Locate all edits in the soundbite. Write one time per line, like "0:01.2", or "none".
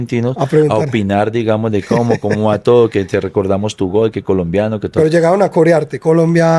0:04.9